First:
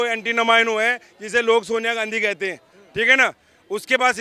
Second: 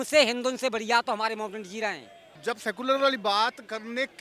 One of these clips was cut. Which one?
second; 1 cut; at 2.3 s

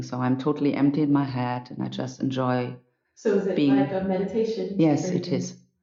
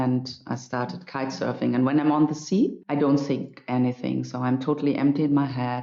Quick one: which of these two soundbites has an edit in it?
second; 1 cut; at 2.8 s

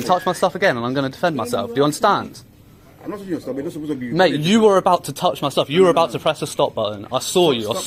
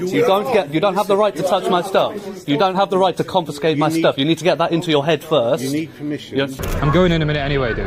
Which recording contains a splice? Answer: second; 1 cut; at 6.6 s

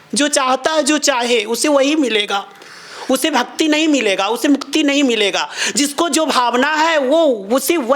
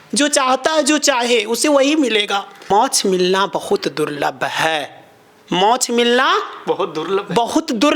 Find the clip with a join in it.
second; 1 cut; at 2.7 s

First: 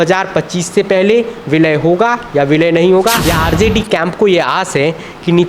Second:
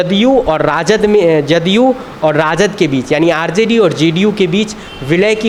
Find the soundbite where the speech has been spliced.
first; 1 cut; at 3.2 s

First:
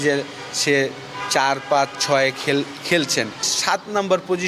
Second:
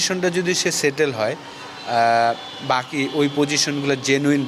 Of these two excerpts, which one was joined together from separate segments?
first; 1 cut; at 3.5 s

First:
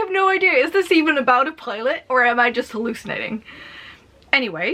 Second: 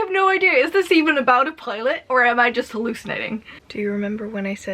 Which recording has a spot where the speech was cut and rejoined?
second; 1 cut; at 3.6 s

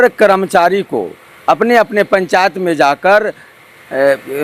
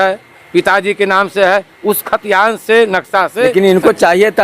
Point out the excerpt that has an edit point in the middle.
second; 1 cut; at 3.5 s

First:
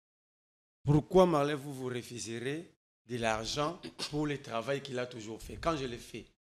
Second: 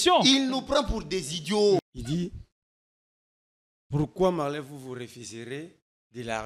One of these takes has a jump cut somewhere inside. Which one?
second; 1 cut; at 1.8 s

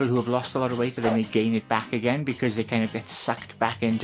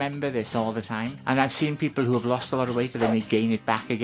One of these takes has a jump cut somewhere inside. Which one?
second; 1 cut; at 1.1 s

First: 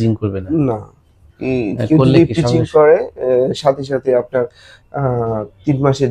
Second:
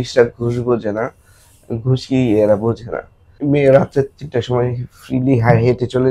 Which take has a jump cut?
second; 1 cut; at 3.3 s

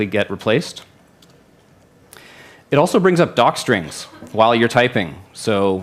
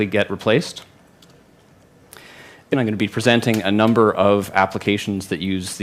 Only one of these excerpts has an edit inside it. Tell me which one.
first; 1 cut; at 2.7 s

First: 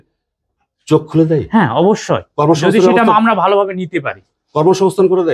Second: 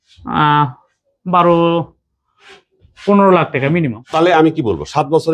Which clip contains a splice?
second; 1 cut; at 4.0 s

